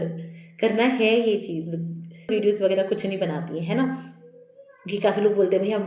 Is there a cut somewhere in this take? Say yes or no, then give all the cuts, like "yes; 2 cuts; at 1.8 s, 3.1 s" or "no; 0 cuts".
yes; 1 cut; at 2.3 s